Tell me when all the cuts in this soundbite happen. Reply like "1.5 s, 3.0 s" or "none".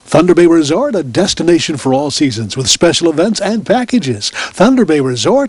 none